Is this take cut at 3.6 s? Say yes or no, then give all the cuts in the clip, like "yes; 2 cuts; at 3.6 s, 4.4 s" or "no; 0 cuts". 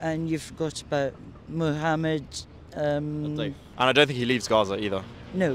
yes; 1 cut; at 3.6 s